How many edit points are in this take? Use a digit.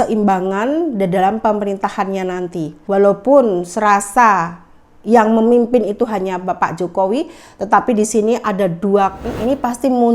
2